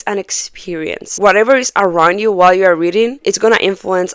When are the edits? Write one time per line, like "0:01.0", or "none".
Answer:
0:01.1
0:03.2

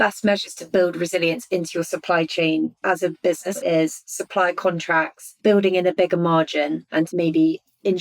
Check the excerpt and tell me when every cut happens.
0:03.6
0:05.2
0:07.1

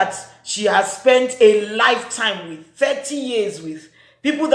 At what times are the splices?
none

